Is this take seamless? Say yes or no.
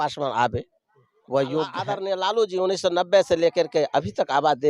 no